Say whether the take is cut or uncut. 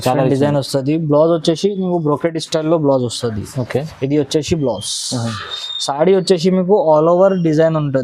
uncut